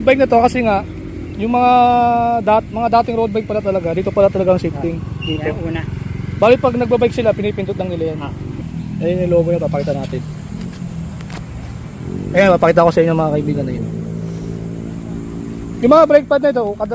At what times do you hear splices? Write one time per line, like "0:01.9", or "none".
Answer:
0:08.6
0:10.2